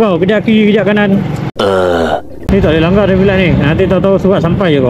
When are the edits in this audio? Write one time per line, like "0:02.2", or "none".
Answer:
none